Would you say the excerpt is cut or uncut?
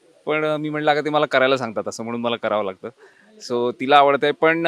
uncut